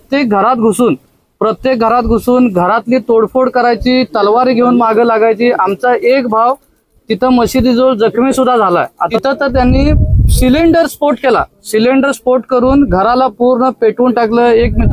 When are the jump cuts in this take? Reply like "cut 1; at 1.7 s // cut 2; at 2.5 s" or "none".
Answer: cut 1; at 9.0 s